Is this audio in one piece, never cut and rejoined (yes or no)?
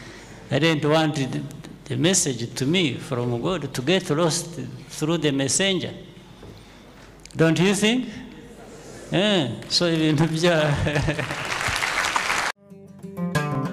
no